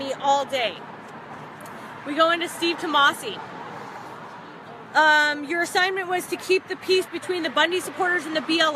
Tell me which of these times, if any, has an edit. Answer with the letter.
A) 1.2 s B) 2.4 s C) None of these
B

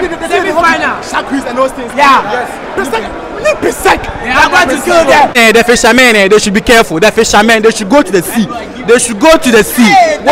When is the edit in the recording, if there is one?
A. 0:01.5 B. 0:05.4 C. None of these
B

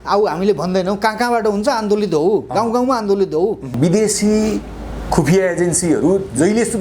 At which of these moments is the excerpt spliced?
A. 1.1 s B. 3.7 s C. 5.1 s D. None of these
B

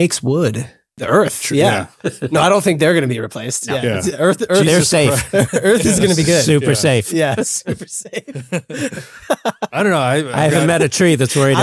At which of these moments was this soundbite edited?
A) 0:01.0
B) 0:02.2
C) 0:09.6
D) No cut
A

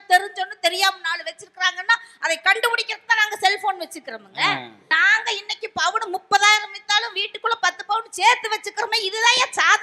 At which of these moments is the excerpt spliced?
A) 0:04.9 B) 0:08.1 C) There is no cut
A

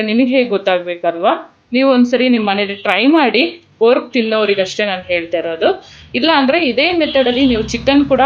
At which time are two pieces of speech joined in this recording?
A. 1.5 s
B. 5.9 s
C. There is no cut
C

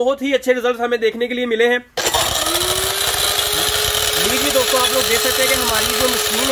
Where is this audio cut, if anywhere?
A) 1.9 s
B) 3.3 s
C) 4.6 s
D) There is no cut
A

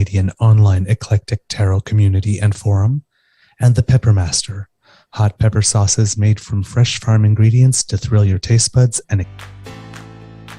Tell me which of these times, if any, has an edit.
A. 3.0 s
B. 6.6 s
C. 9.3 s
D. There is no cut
C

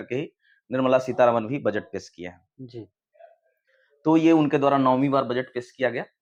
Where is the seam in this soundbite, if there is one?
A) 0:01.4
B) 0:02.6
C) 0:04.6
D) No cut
D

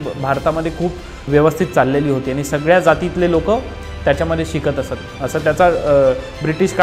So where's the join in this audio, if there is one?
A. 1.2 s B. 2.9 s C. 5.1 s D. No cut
A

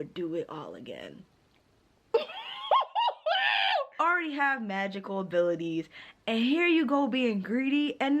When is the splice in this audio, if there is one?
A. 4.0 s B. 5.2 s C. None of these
A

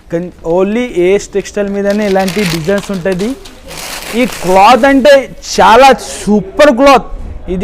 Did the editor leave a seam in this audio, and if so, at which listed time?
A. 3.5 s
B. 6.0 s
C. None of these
A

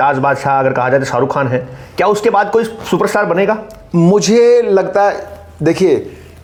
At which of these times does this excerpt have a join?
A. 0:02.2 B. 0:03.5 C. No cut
C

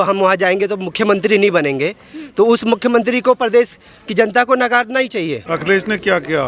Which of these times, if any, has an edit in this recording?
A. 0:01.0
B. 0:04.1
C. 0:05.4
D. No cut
C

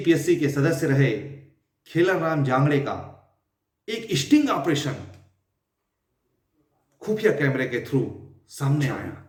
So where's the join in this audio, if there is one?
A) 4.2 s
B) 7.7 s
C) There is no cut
C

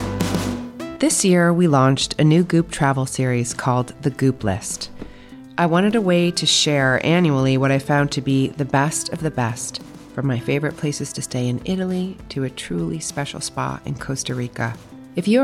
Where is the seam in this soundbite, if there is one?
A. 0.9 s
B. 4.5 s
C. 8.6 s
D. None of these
A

